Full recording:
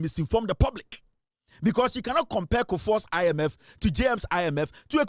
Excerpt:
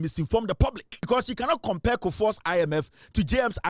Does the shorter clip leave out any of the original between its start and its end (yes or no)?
yes